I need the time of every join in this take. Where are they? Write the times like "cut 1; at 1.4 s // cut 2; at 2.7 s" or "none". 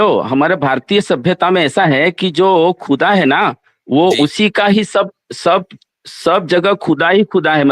none